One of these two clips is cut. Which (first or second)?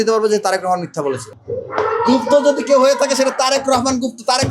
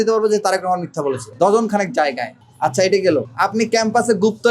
first